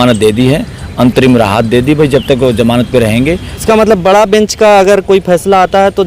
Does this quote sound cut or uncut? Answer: cut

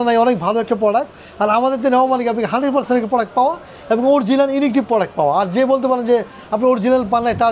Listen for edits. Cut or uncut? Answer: uncut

